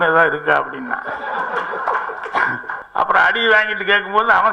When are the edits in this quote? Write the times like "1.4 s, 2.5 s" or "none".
2.8 s

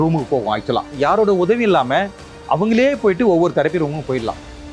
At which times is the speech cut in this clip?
0.9 s

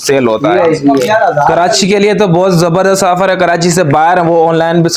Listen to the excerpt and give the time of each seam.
1.5 s

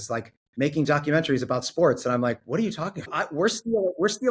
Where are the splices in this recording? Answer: 3.2 s

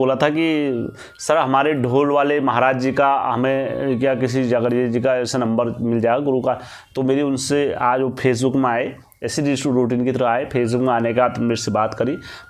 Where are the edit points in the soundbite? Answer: none

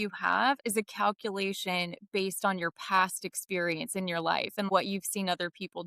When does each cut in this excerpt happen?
4.7 s

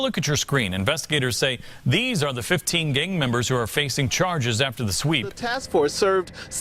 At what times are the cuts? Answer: 5.4 s

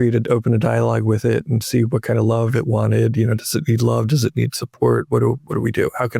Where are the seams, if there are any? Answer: none

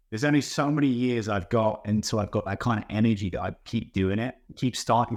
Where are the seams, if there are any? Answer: none

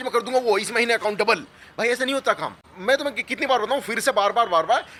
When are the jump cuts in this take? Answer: none

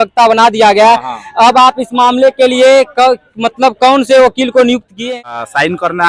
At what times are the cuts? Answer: 5.2 s

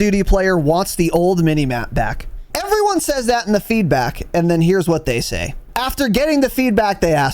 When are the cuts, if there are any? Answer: 2.5 s, 5.7 s

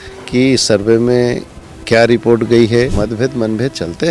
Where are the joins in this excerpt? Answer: 2.9 s

